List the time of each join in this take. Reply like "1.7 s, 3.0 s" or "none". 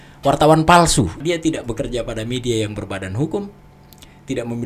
1.2 s